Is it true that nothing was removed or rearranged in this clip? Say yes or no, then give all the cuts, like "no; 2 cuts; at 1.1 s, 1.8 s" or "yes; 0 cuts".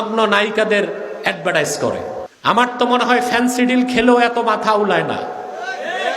no; 1 cut; at 2.3 s